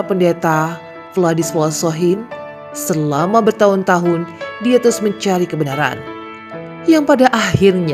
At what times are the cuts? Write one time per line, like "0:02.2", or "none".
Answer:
none

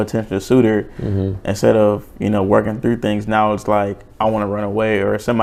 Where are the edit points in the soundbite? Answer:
none

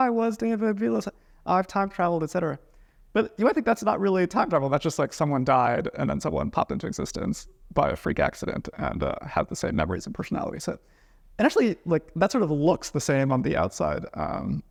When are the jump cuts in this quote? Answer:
none

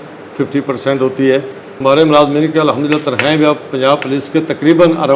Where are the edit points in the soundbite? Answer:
0:01.8

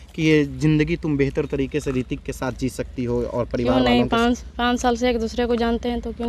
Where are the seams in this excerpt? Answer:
none

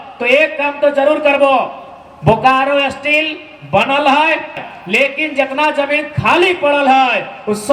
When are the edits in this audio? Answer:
0:04.6

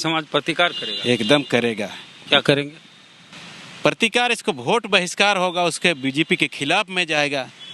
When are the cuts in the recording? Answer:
none

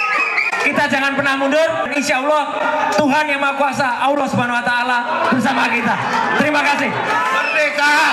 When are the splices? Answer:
0:01.9

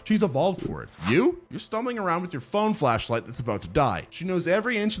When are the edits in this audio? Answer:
none

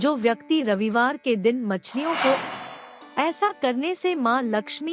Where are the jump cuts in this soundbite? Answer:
0:02.4

